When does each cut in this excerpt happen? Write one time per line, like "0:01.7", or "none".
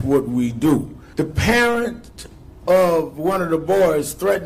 0:01.0